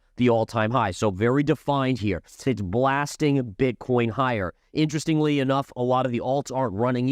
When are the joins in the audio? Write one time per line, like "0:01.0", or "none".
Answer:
0:02.5